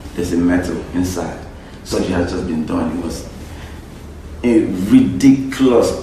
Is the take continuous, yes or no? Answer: no